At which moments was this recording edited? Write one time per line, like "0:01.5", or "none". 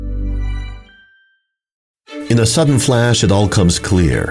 0:02.0